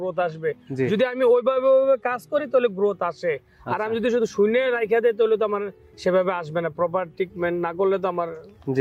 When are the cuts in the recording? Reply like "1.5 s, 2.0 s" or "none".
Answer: none